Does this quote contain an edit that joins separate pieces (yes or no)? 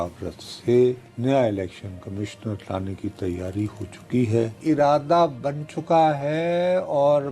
yes